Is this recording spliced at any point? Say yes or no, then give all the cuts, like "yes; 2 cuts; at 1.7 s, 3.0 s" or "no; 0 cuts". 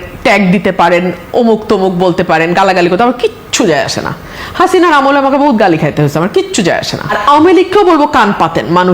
yes; 1 cut; at 7.2 s